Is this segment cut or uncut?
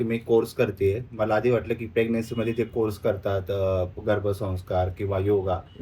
uncut